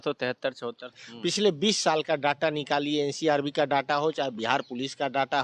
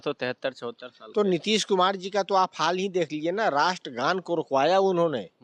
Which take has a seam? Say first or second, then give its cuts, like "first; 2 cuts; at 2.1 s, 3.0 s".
first; 1 cut; at 1.0 s